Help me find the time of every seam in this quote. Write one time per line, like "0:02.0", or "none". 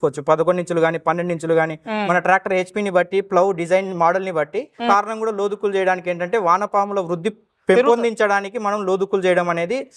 0:04.9